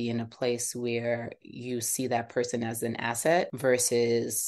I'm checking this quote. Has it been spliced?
yes; 1 cut; at 3.5 s

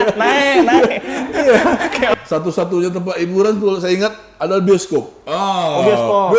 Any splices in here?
yes; 1 cut; at 2.1 s

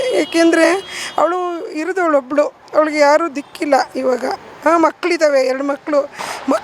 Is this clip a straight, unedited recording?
no; 1 cut; at 2.6 s

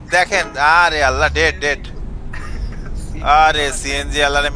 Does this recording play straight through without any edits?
yes; 0 cuts

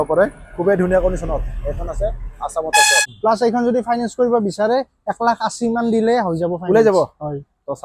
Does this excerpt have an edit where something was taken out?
yes; 1 cut; at 3.0 s

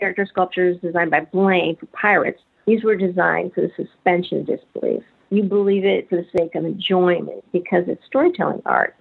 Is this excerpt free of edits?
yes; 0 cuts

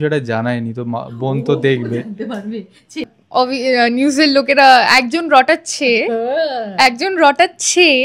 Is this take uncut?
no; 1 cut; at 3.1 s

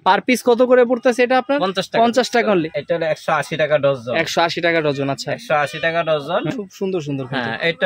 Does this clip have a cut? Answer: yes; 2 cuts; at 2.7 s, 6.5 s

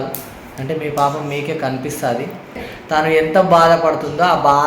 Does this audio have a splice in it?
yes; 1 cut; at 2.7 s

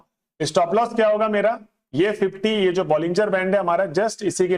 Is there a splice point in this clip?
no; 0 cuts

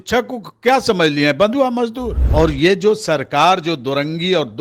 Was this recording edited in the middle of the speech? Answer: yes; 1 cut; at 2.1 s

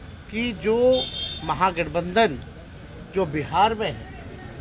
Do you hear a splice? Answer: no; 0 cuts

